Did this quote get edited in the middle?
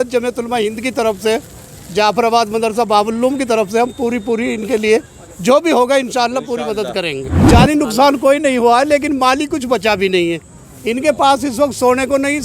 yes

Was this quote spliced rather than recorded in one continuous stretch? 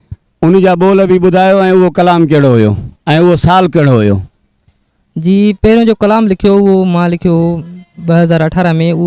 no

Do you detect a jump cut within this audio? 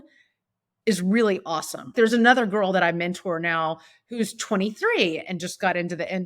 yes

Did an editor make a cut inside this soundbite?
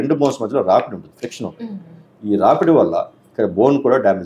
no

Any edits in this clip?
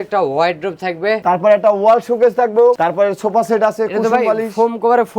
yes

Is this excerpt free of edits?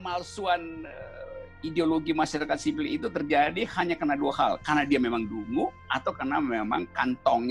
yes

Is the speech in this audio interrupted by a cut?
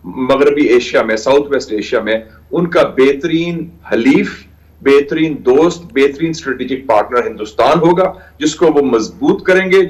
no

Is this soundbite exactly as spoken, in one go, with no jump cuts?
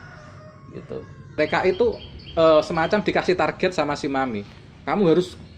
no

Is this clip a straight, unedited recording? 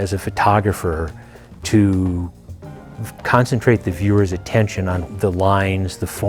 no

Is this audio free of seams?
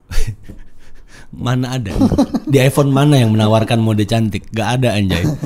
no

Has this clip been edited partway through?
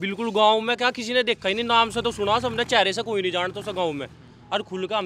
no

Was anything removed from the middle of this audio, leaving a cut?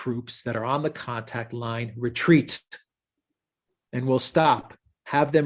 no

